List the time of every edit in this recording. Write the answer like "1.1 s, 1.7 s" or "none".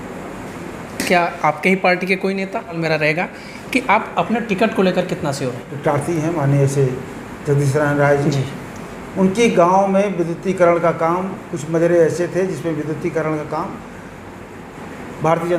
2.8 s, 5.7 s